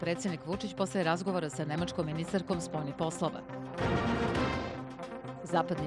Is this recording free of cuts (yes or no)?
yes